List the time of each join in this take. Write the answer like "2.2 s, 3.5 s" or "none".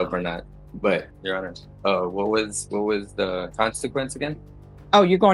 1.1 s